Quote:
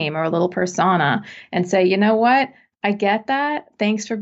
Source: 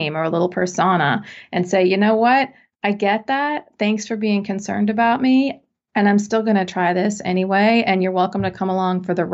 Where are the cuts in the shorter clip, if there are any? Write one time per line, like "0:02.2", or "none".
none